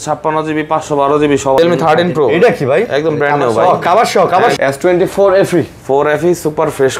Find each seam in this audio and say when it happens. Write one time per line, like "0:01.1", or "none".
0:01.6
0:04.5

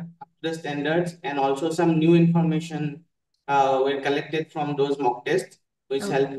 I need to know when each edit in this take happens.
none

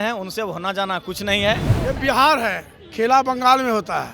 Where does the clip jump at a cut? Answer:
0:01.7

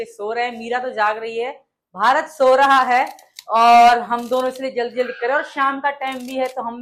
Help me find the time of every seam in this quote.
none

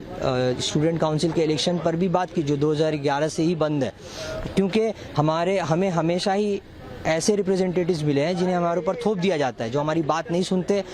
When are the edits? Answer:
none

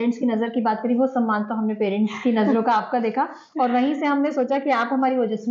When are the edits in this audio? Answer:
none

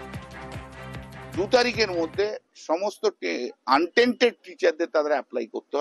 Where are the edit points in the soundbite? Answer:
0:01.4

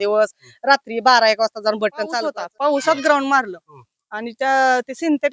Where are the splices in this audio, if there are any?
0:02.3

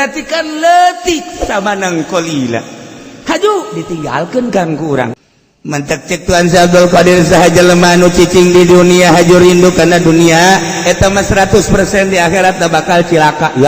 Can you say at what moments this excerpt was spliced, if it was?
0:05.1

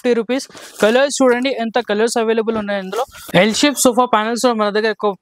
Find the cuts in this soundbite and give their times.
0:03.2

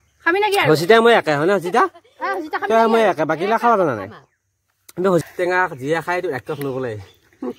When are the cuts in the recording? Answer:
0:05.2

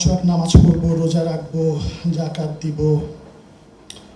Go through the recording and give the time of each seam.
none

